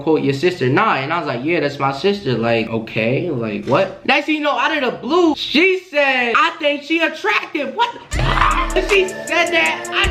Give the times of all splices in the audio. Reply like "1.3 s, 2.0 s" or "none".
4.0 s, 5.3 s